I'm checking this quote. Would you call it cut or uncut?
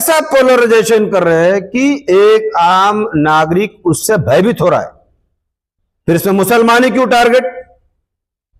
uncut